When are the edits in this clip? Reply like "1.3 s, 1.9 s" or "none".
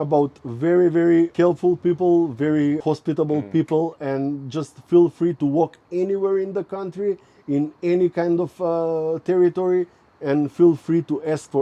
1.3 s, 2.8 s

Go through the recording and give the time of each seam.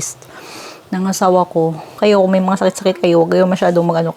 2.0 s

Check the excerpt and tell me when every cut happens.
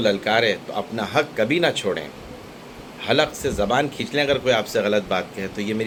none

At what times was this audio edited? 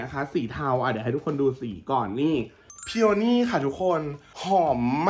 2.6 s

